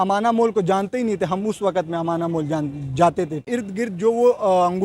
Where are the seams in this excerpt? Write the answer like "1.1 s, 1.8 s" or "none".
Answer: 3.5 s